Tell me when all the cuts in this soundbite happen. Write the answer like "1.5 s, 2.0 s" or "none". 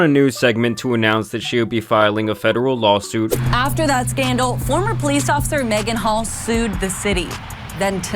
3.4 s